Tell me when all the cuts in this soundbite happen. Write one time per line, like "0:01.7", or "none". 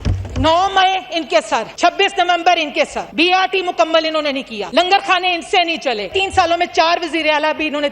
0:01.7
0:03.0
0:04.5
0:06.1